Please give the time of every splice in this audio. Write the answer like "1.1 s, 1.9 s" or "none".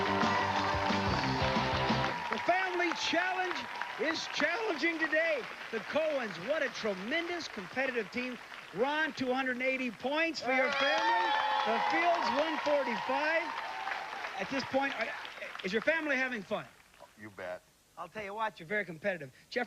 16.6 s